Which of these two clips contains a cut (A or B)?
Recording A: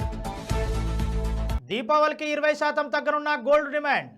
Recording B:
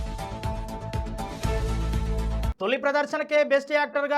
A